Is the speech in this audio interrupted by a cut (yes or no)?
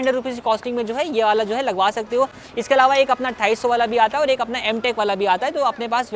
no